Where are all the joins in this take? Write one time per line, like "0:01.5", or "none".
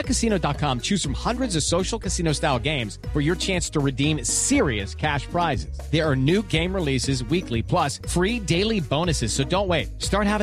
none